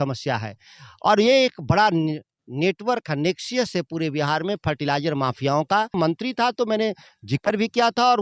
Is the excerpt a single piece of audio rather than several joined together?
no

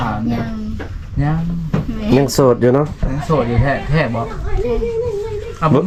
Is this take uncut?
yes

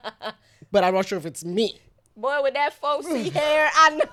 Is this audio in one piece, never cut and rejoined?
yes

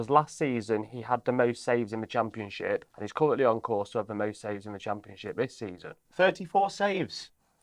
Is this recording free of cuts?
no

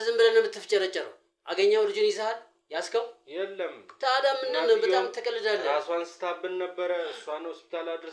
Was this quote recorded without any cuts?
yes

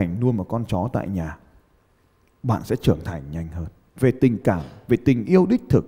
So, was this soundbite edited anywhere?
no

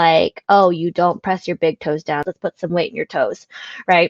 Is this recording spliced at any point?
yes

